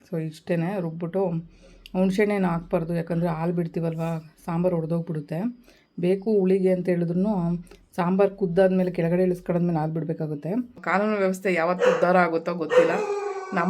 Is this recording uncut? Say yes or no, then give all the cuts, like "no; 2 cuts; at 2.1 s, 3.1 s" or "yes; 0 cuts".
no; 1 cut; at 10.8 s